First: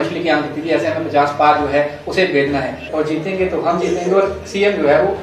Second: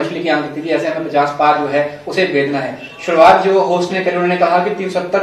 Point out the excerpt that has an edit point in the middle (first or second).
first